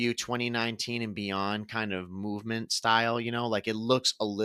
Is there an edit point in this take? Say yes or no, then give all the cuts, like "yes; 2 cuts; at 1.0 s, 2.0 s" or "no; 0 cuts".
no; 0 cuts